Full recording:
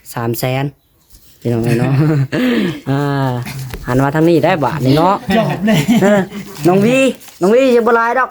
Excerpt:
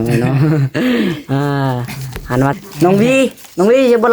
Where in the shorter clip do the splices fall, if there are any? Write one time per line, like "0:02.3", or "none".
0:02.5

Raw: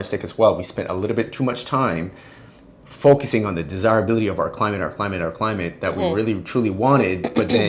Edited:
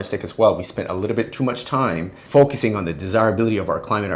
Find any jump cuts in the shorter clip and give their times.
0:02.2

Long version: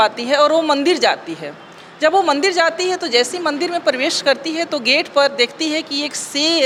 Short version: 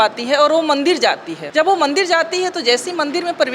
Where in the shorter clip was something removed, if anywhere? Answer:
0:01.3

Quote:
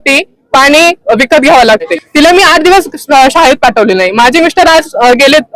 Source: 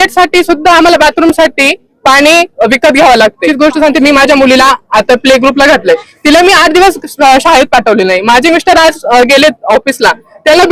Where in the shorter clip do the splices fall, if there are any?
0:02.0

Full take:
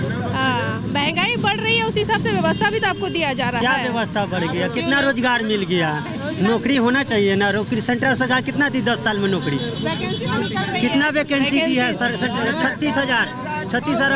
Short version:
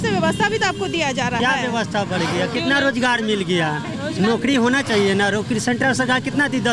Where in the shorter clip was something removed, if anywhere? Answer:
none

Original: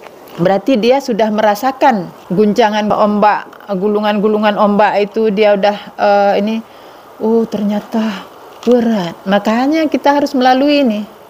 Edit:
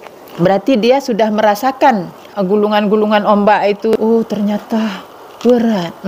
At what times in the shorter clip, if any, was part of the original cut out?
0:02.2
0:03.9

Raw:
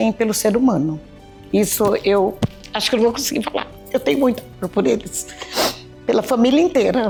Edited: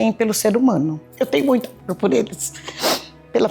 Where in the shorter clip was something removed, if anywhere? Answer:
0:01.0

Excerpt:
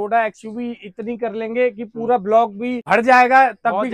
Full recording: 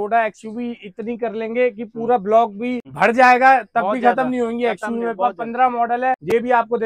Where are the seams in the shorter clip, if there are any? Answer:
0:02.8

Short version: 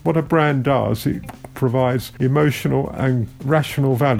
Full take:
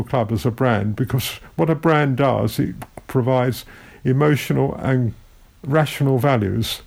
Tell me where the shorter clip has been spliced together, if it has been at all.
0:02.1
0:03.3

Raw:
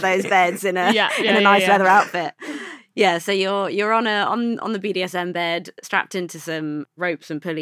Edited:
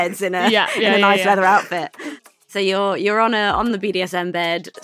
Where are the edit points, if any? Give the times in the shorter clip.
0:02.5
0:03.7

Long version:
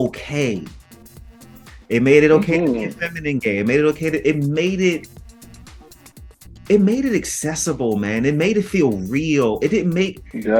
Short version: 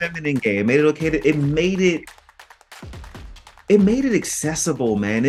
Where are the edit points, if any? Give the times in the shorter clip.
none

